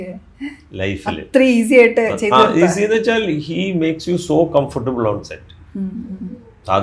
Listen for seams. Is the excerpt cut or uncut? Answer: uncut